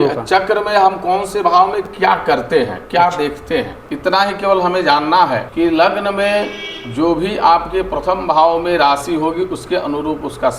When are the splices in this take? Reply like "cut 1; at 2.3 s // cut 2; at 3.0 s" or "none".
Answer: cut 1; at 3.8 s // cut 2; at 5.5 s